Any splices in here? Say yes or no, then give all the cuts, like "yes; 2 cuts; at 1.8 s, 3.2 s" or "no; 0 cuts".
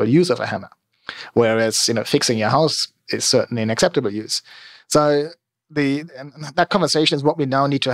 no; 0 cuts